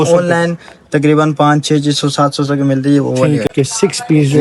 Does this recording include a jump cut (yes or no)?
yes